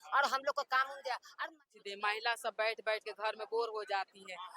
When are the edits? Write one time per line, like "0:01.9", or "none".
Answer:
0:01.6